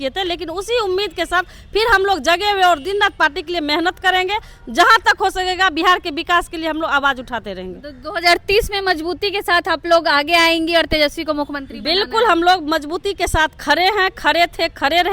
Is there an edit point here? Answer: no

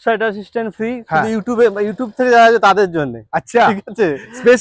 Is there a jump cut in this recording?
no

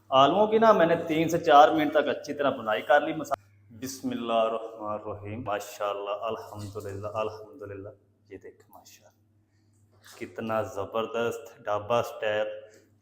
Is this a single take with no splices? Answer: no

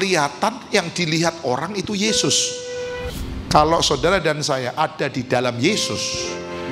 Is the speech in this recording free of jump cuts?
no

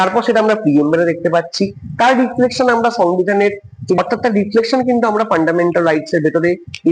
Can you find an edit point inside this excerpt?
yes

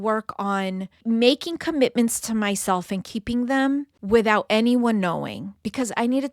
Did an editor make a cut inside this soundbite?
yes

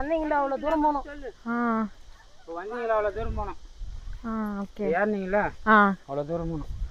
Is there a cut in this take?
no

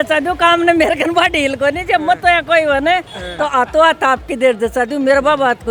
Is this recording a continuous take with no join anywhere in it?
yes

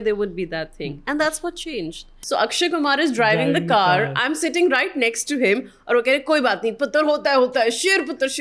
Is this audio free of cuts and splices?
no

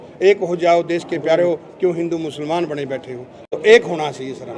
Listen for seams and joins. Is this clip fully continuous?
yes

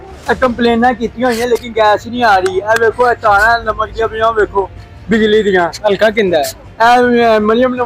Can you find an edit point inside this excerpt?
no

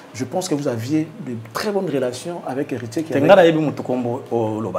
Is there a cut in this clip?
no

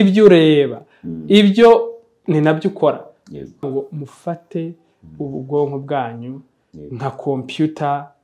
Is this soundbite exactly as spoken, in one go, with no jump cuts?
no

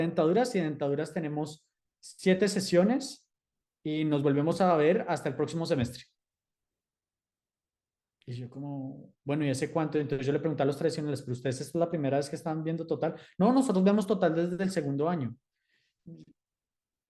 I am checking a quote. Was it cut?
no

